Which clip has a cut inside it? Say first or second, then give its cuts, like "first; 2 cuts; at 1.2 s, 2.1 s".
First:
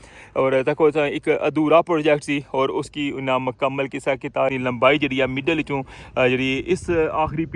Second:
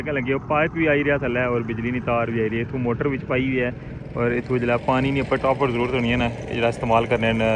first; 1 cut; at 4.5 s